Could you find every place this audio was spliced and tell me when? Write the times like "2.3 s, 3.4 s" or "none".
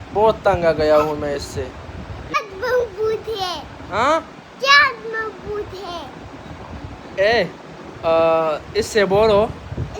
2.4 s